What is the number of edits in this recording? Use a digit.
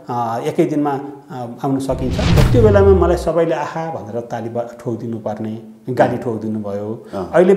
1